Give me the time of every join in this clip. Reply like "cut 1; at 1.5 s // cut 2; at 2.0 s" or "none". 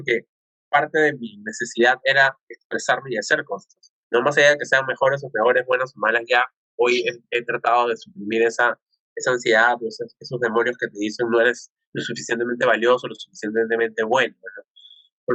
none